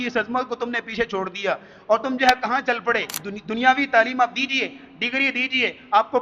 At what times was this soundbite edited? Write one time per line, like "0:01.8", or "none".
0:03.2